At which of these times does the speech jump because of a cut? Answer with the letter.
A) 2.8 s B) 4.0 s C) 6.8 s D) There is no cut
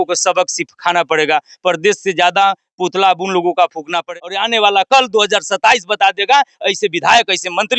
B